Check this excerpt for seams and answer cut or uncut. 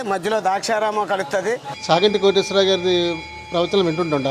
cut